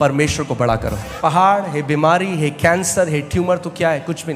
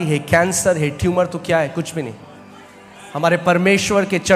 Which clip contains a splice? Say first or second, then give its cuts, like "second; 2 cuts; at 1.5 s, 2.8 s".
first; 1 cut; at 1.2 s